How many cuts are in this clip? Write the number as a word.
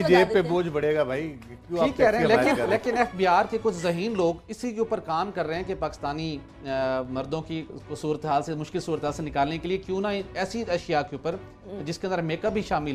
one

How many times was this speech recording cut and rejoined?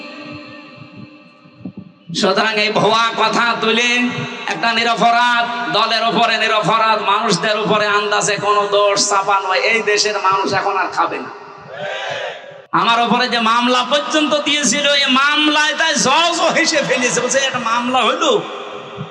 one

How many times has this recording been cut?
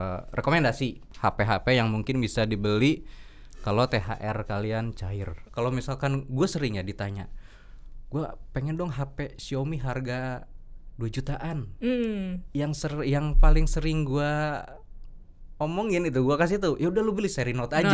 two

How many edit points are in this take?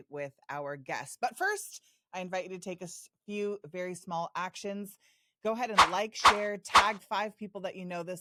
zero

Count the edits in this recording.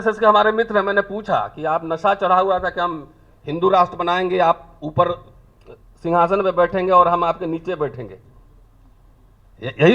zero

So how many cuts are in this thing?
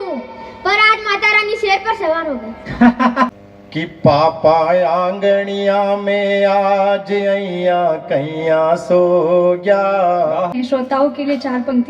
two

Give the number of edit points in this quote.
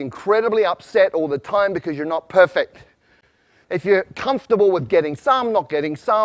one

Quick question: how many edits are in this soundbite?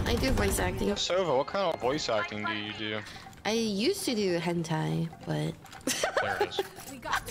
one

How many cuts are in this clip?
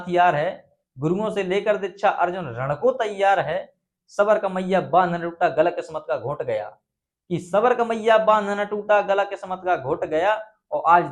zero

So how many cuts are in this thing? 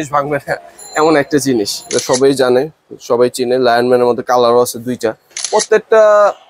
two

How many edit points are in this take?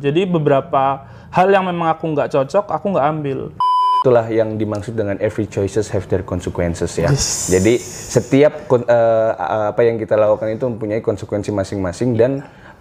one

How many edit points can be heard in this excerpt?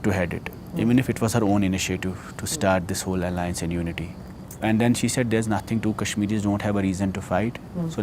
zero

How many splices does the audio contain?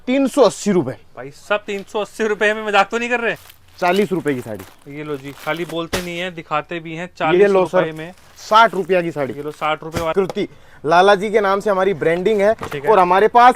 two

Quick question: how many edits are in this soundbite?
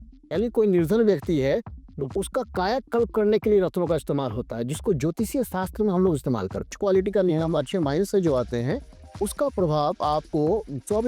one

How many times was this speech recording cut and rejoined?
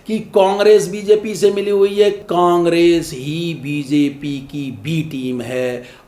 one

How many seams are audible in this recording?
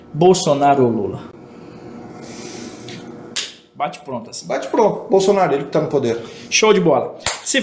zero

